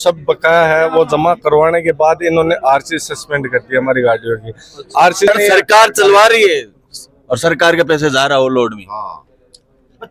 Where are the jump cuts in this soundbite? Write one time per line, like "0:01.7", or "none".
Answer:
0:05.3